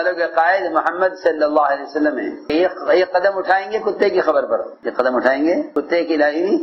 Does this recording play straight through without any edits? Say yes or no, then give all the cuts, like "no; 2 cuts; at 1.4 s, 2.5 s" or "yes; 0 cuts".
no; 3 cuts; at 2.4 s, 4.8 s, 5.7 s